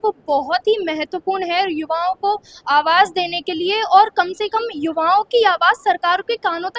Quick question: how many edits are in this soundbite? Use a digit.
0